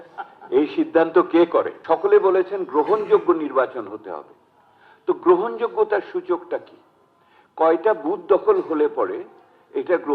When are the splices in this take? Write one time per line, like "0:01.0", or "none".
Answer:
0:01.8

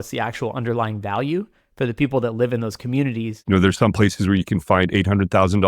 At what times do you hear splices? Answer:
0:03.3

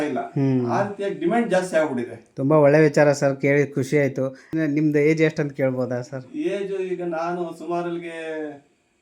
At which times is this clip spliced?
0:04.5

